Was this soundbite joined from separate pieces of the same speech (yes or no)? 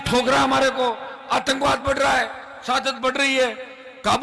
no